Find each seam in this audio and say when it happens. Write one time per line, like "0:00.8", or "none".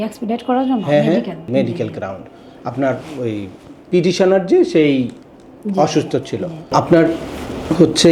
0:01.5
0:06.7